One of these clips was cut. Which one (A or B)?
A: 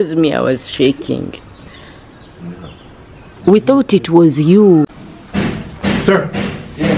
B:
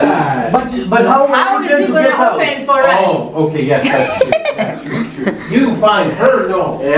A